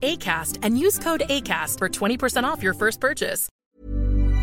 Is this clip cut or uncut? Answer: cut